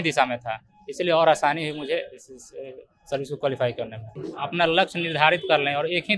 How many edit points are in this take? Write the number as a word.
one